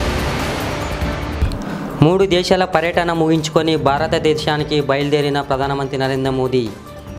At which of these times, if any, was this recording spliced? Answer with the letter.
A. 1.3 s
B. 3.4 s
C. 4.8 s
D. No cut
A